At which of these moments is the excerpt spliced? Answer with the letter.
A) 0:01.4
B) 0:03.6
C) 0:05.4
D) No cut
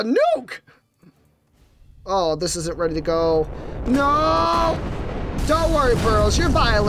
C